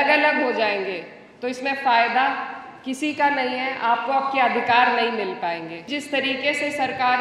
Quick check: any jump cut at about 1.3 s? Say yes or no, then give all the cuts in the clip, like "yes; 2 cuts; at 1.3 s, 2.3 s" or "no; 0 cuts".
no; 1 cut; at 5.9 s